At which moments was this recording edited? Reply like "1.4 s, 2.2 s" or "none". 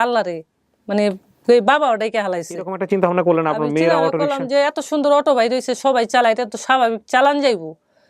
2.8 s